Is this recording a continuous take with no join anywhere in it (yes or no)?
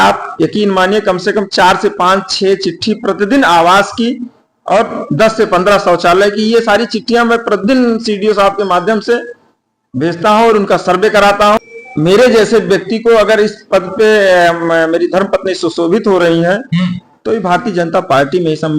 no